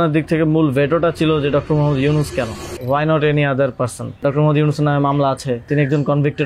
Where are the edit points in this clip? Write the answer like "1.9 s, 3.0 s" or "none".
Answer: 2.7 s, 4.2 s, 5.7 s